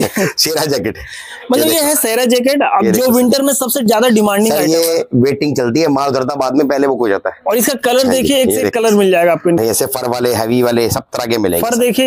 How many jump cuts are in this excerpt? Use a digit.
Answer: 1